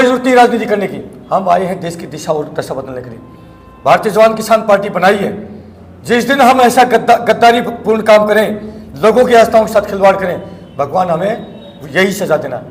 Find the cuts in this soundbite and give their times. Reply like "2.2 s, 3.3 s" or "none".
none